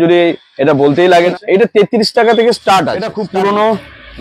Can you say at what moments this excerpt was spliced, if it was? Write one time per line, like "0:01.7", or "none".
0:01.3
0:03.2